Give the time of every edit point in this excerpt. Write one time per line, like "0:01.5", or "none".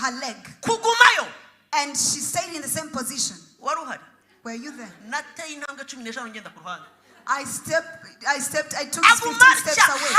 0:04.6